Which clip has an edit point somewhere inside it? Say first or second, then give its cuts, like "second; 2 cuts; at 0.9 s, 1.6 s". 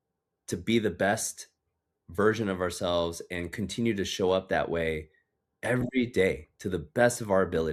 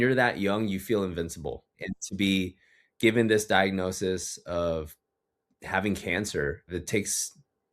second; 2 cuts; at 1.8 s, 6.7 s